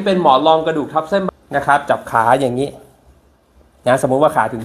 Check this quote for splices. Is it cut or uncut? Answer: cut